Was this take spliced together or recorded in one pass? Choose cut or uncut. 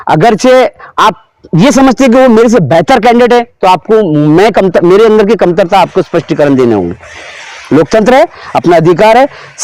uncut